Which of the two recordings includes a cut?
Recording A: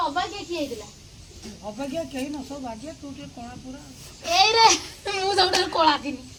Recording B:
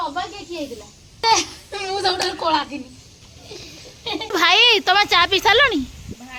B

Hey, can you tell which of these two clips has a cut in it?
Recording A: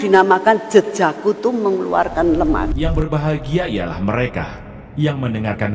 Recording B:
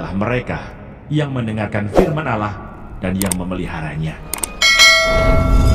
A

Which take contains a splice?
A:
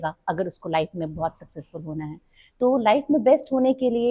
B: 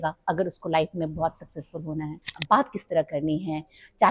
B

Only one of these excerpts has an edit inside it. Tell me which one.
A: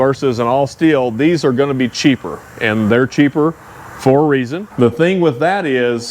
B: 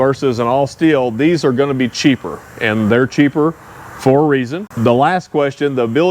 A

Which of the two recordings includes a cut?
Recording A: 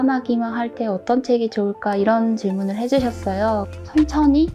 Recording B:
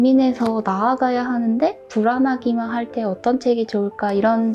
A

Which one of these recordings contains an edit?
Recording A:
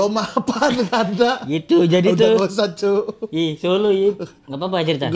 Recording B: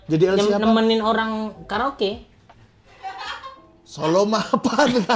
B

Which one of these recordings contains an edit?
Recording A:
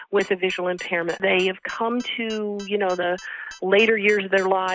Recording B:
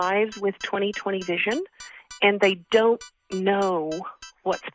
A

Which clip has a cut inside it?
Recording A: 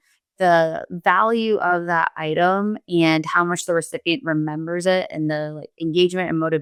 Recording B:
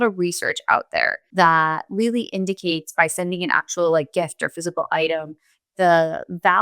B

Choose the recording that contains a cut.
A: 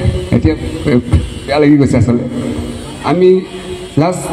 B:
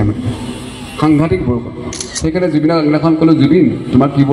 B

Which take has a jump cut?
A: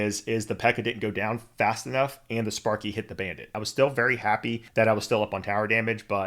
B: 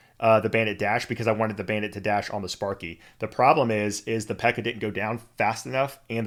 A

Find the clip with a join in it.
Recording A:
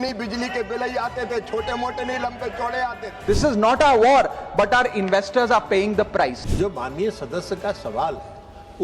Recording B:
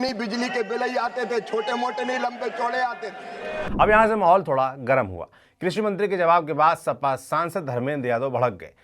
A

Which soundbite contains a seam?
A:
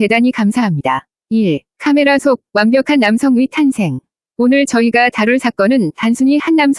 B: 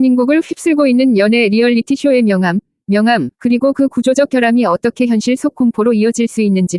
A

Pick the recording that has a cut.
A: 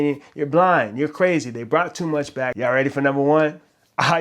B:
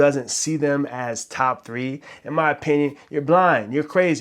A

